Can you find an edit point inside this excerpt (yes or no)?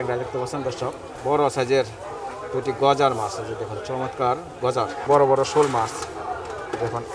yes